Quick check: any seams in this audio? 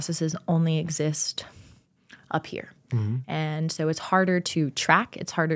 no; 0 cuts

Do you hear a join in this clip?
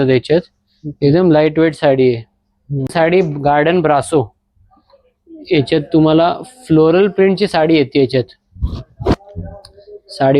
yes; 1 cut; at 2.9 s

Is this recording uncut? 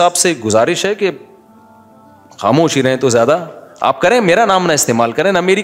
yes; 0 cuts

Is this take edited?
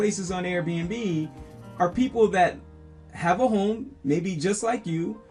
no; 0 cuts

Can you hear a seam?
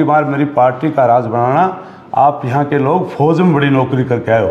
no; 0 cuts

